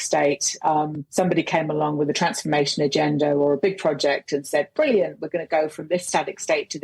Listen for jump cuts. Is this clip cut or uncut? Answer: cut